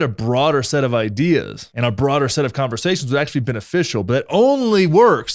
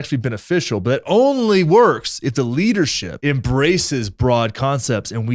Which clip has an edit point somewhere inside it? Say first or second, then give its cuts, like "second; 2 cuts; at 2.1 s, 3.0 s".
second; 1 cut; at 3.1 s